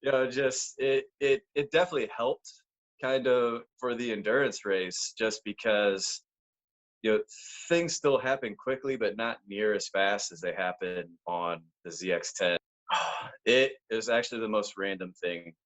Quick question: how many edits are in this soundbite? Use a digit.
1